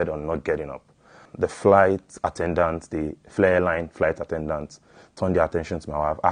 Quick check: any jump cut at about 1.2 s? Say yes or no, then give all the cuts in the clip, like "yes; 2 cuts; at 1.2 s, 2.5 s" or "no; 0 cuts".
yes; 1 cut; at 1.2 s